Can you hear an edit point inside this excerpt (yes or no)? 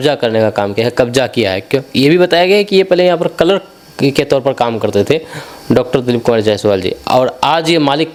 no